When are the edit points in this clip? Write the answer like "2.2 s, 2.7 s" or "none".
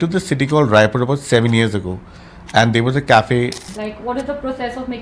3.6 s